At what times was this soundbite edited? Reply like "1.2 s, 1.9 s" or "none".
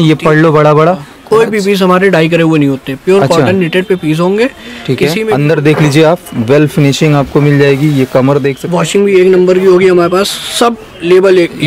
1.1 s, 5.3 s, 8.6 s